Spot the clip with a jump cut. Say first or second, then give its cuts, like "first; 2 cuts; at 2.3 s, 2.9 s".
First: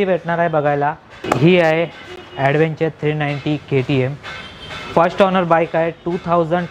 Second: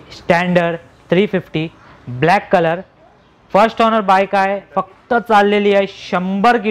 first; 1 cut; at 1.2 s